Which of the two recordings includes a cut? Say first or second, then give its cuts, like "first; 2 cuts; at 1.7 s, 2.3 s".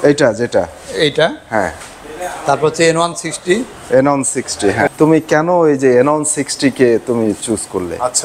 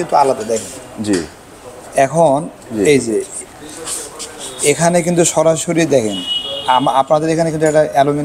first; 1 cut; at 4.9 s